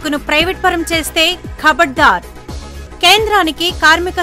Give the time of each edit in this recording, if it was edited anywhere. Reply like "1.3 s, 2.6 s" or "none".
none